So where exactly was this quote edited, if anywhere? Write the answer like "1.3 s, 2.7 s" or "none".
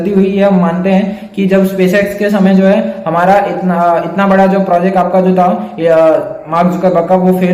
none